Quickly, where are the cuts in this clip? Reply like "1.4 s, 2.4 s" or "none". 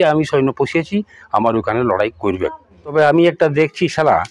2.9 s